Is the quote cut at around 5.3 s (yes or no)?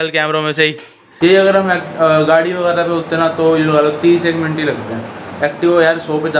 no